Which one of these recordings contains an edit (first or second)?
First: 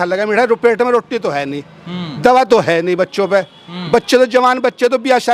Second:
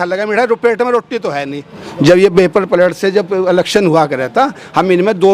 second